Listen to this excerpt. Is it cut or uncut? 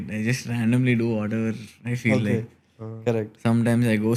uncut